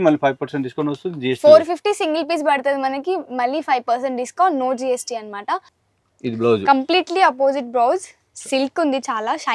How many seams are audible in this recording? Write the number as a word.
one